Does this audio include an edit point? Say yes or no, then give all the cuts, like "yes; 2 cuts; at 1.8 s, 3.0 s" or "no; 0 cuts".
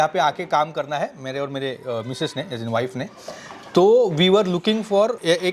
no; 0 cuts